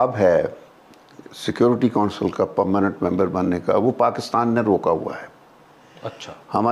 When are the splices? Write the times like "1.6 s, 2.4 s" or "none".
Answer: none